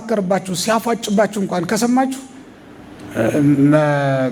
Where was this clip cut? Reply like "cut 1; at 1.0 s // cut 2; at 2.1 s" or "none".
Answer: none

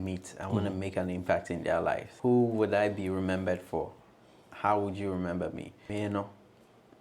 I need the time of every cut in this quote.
cut 1; at 2.1 s // cut 2; at 5.7 s

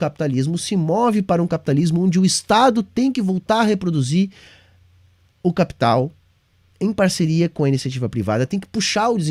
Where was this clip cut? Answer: none

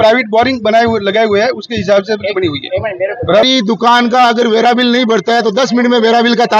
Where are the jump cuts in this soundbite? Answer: cut 1; at 3.4 s

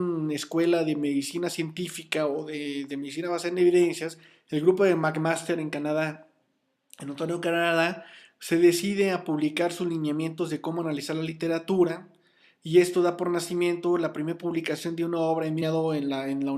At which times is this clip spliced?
none

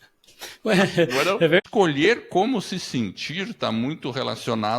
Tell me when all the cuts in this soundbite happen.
cut 1; at 1.6 s

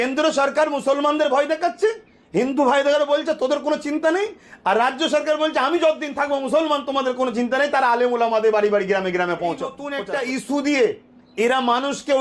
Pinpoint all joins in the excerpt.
cut 1; at 9.9 s

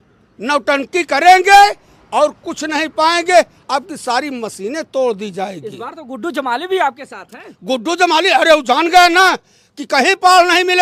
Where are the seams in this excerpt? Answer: none

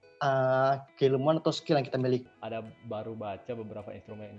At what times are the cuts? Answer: cut 1; at 2.2 s

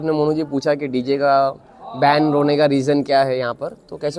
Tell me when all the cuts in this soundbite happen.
none

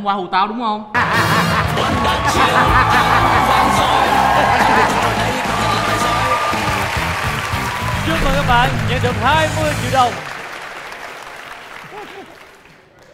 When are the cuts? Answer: cut 1; at 0.9 s

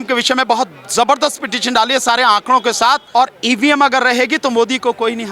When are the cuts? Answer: cut 1; at 3.0 s

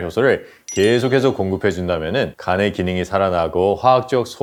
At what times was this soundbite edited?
none

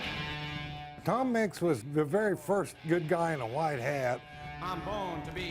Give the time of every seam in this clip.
cut 1; at 0.8 s // cut 2; at 1.8 s // cut 3; at 4.4 s

